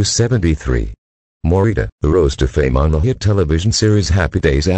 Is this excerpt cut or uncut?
uncut